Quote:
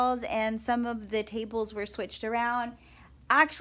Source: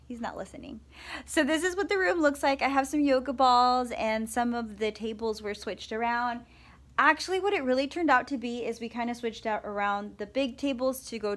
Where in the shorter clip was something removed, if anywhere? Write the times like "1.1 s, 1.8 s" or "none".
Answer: none

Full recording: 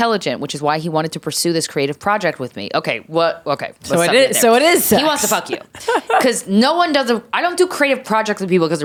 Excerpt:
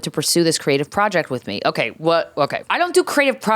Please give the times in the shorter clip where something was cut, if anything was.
2.7 s

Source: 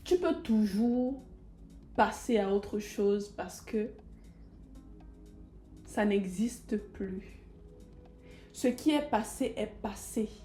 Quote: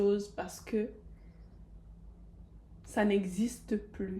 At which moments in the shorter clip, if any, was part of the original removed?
none

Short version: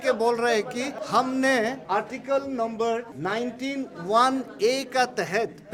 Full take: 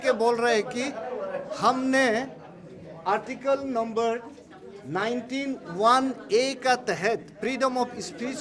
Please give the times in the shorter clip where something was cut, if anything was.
1.0 s, 1.8 s, 3.1 s

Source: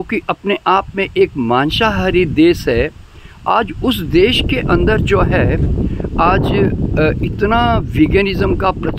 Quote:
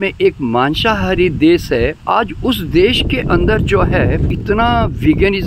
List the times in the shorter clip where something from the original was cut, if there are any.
2.0 s, 4.3 s

